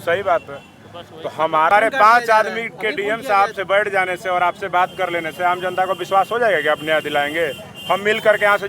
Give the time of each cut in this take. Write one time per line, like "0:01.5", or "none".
0:01.7